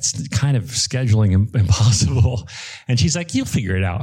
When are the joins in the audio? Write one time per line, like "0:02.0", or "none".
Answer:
none